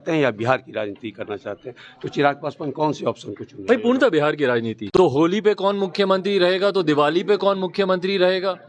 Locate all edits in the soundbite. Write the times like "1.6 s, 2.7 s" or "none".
4.8 s